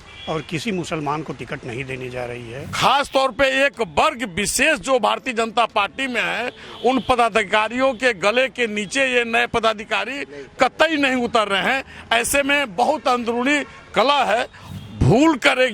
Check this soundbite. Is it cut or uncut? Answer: cut